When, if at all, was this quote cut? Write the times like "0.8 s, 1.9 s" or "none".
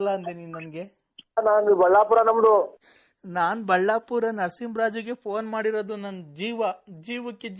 1.7 s